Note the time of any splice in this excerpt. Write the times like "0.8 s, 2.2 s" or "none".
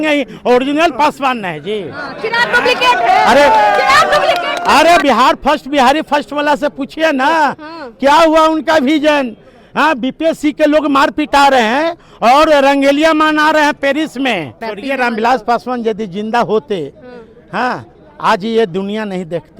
5.0 s, 14.6 s